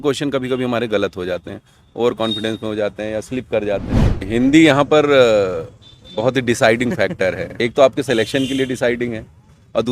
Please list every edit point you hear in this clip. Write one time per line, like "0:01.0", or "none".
0:04.2
0:07.5